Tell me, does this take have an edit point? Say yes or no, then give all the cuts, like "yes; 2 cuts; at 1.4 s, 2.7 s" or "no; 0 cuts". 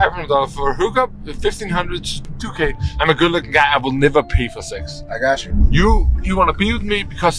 yes; 2 cuts; at 2.4 s, 5.5 s